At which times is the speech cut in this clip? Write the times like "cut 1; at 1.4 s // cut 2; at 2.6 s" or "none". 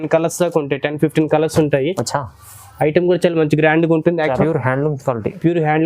cut 1; at 4.4 s